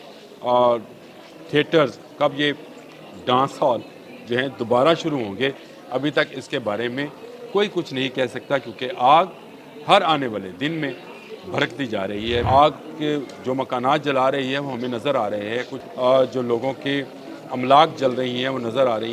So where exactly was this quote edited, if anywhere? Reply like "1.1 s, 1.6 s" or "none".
12.4 s, 15.8 s